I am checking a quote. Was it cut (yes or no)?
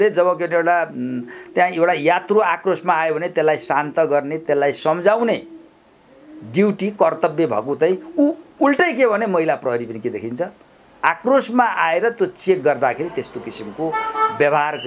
no